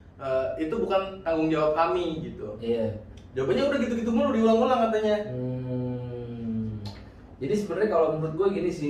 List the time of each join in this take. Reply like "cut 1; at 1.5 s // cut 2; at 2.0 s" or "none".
none